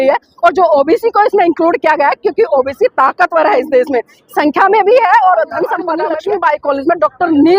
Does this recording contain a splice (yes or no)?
yes